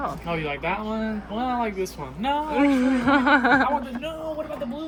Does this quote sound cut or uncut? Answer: uncut